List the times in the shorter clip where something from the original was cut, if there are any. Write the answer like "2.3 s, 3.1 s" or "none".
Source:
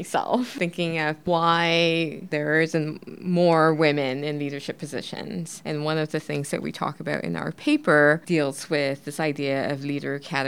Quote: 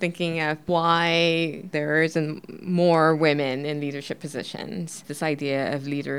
5.0 s